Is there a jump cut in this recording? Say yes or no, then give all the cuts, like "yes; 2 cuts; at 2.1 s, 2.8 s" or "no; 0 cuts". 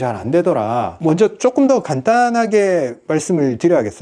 yes; 1 cut; at 0.9 s